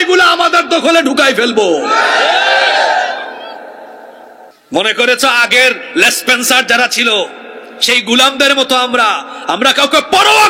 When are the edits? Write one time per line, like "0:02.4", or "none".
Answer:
0:04.5